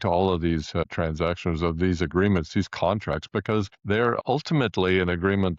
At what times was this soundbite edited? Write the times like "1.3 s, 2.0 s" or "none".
0.9 s, 4.0 s